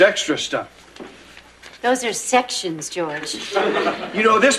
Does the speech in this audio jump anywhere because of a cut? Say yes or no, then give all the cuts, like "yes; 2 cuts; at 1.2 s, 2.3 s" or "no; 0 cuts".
no; 0 cuts